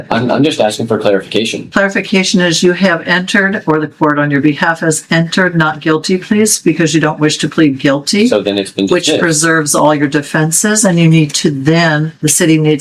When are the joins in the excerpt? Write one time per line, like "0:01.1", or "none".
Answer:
none